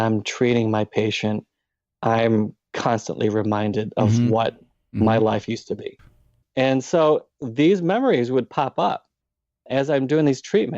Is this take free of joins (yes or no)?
no